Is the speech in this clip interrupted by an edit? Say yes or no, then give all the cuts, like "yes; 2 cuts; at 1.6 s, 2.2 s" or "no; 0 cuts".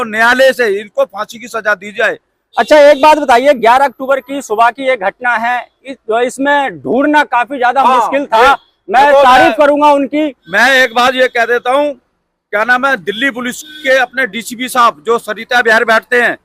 no; 0 cuts